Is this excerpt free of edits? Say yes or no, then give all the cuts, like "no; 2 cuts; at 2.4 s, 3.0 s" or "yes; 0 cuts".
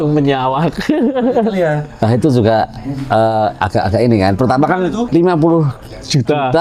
no; 1 cut; at 5.0 s